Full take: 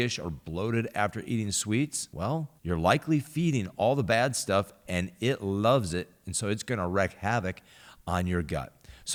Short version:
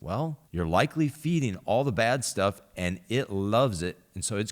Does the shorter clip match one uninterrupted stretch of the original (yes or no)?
yes